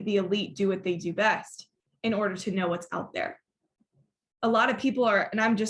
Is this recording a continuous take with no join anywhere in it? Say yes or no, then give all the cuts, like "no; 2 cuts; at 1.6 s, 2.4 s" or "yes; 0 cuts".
yes; 0 cuts